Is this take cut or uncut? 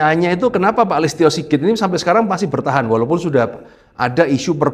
uncut